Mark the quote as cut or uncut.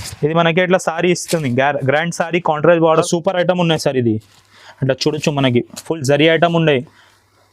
cut